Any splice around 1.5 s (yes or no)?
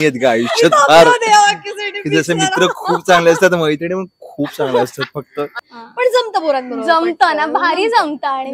no